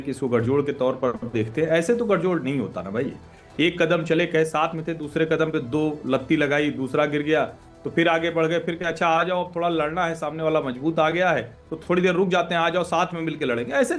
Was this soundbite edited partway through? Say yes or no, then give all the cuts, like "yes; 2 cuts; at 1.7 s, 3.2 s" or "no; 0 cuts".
no; 0 cuts